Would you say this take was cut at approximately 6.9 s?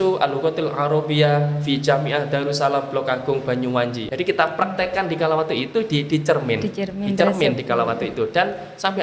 no; 1 cut; at 4.0 s

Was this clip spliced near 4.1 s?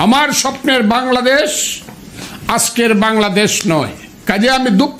yes; 1 cut; at 4.1 s

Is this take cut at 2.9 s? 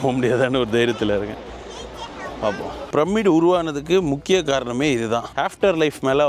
yes; 1 cut; at 2.9 s

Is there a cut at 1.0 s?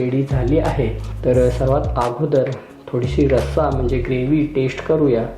yes; 1 cut; at 1.0 s

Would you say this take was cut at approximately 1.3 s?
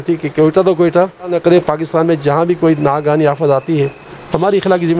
yes; 1 cut; at 1.3 s

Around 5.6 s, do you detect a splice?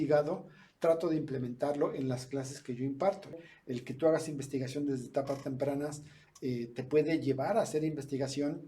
no; 1 cut; at 3.3 s

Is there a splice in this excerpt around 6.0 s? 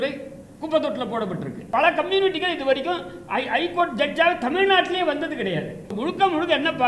yes; 2 cuts; at 1.7 s, 6.0 s

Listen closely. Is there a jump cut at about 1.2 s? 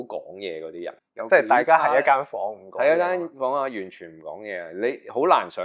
yes; 1 cut; at 1.2 s

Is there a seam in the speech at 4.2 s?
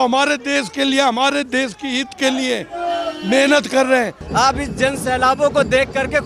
yes; 1 cut; at 4.2 s

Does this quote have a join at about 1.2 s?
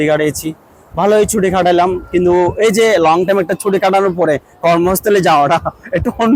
no; 0 cuts

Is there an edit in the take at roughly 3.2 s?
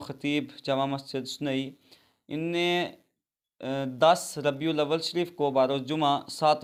no; 0 cuts

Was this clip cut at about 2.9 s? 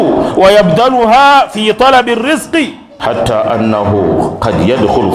yes; 1 cut; at 2.9 s

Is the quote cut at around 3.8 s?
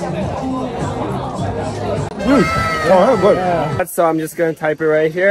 yes; 1 cut; at 3.8 s

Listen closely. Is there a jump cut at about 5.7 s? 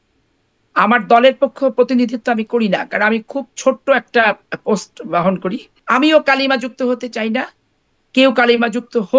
yes; 1 cut; at 5.7 s

